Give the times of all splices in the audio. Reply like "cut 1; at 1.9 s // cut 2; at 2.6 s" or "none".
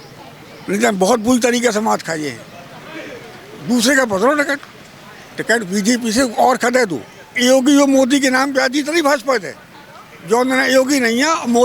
cut 1; at 7.3 s

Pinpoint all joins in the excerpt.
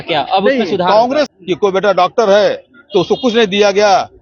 cut 1; at 1.3 s

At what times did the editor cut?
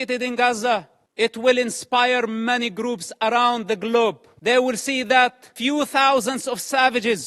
cut 1; at 1.0 s // cut 2; at 4.3 s // cut 3; at 5.5 s

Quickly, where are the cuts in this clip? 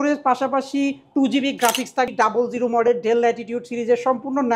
cut 1; at 2.1 s

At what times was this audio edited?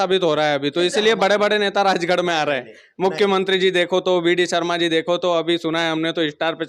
none

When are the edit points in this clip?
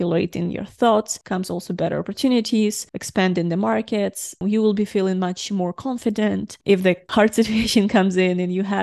cut 1; at 1.2 s // cut 2; at 4.4 s // cut 3; at 7.0 s

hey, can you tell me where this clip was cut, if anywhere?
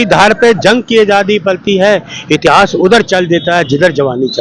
none

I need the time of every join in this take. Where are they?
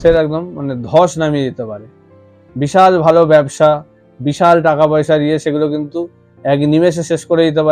none

